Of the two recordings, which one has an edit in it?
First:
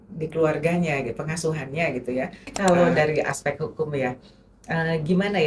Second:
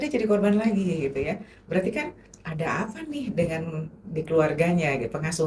first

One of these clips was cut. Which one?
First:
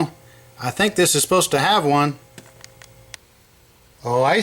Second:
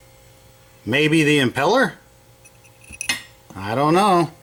first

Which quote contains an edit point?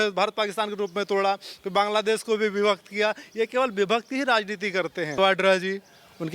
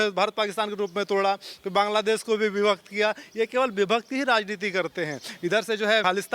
first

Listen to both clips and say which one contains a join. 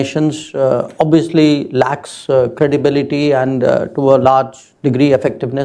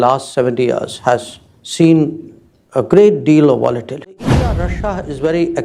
second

